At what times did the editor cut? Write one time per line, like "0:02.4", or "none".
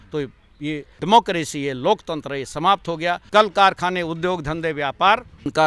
0:01.0
0:03.2